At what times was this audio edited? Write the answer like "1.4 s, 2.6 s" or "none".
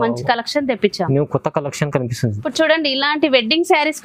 2.4 s